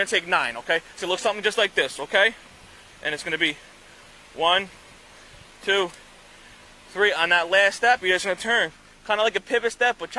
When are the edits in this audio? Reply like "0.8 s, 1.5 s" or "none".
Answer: none